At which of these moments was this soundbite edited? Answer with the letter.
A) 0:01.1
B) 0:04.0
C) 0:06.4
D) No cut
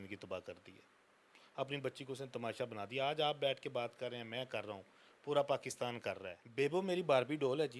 C